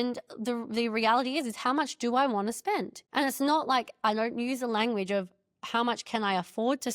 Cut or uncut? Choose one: cut